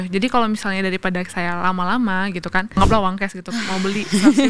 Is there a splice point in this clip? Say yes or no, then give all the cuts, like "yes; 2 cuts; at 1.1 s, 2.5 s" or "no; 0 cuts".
yes; 1 cut; at 2.7 s